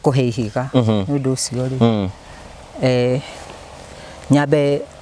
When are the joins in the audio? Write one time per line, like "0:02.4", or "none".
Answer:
none